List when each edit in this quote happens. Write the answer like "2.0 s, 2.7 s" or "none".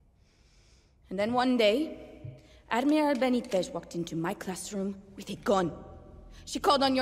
none